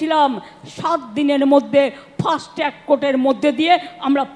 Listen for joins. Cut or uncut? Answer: uncut